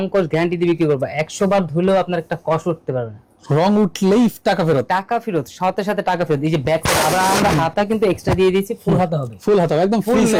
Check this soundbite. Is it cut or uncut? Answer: uncut